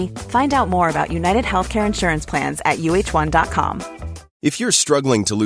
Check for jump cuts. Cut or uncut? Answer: uncut